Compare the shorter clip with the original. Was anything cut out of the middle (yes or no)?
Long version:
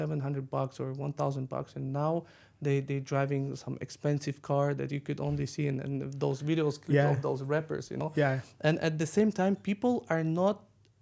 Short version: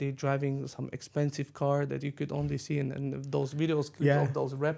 no